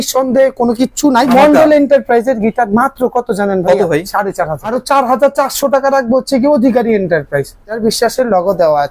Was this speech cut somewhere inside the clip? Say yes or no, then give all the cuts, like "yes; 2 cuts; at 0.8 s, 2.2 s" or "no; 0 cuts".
yes; 3 cuts; at 1.3 s, 4.7 s, 7.8 s